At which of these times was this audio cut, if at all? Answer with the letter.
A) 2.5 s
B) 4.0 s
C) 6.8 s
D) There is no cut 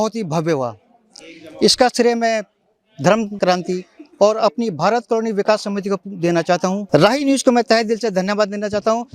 C